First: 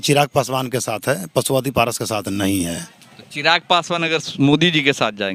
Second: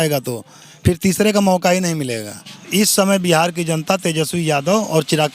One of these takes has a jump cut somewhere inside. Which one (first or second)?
second